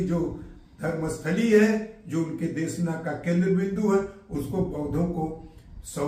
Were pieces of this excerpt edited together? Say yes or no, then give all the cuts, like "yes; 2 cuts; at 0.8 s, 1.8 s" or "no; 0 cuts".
no; 0 cuts